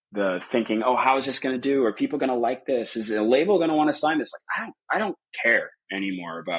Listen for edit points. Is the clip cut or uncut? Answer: uncut